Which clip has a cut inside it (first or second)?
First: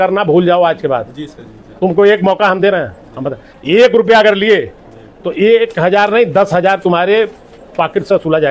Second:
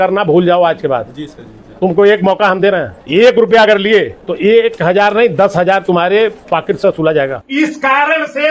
second